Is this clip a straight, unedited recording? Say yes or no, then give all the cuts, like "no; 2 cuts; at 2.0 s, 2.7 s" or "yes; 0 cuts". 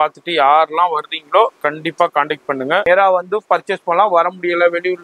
no; 1 cut; at 2.8 s